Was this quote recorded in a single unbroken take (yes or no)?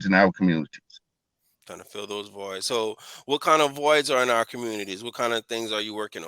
yes